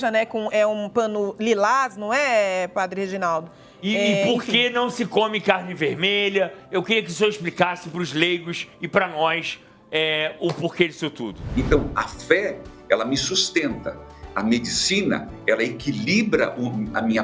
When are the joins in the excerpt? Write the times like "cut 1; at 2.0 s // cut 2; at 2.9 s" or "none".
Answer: cut 1; at 11.3 s